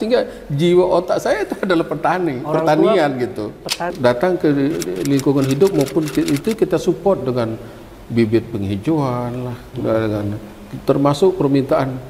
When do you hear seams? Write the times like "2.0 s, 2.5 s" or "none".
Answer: 3.9 s